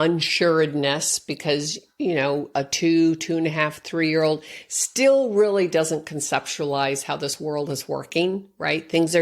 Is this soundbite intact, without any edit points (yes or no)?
yes